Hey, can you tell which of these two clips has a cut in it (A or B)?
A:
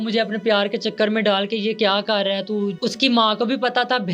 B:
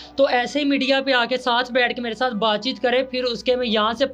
A